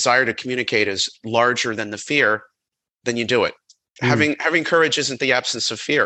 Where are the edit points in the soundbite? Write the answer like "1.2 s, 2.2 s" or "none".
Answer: 1.1 s, 3.8 s